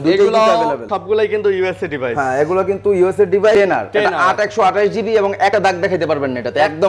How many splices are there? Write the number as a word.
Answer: three